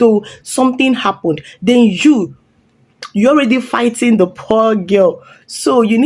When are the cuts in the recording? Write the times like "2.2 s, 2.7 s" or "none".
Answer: none